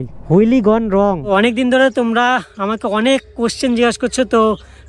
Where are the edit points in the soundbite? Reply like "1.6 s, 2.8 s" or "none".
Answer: 1.2 s